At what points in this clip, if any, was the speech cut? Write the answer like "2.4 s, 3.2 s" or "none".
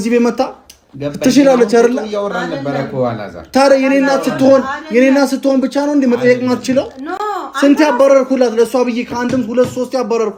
none